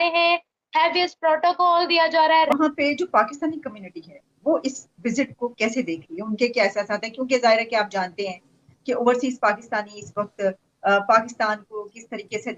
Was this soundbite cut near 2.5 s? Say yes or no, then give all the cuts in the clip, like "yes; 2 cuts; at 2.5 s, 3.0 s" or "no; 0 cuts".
yes; 1 cut; at 2.5 s